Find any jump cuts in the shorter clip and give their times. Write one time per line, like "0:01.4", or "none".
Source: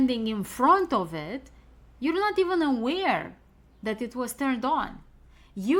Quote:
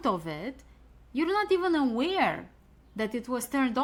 none